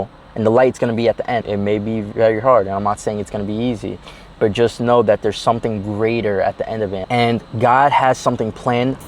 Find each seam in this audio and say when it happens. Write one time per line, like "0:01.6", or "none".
0:01.5